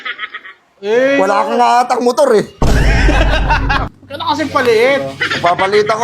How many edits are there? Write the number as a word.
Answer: one